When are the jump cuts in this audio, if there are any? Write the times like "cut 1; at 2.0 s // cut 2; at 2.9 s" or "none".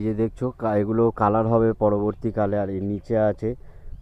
none